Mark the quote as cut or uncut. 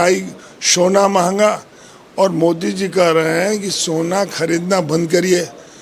uncut